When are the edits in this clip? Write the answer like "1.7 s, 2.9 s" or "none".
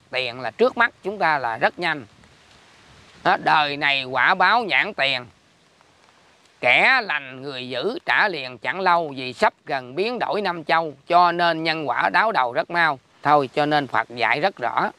13.2 s